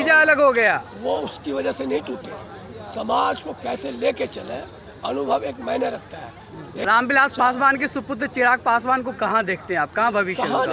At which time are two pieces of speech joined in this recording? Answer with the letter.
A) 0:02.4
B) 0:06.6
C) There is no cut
B